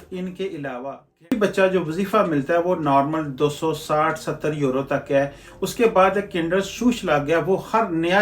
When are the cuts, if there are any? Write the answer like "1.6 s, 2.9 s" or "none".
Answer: 1.3 s